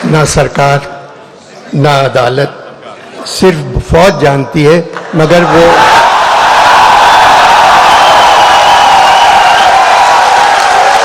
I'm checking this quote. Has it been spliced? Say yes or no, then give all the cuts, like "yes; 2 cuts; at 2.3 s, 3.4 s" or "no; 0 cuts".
no; 0 cuts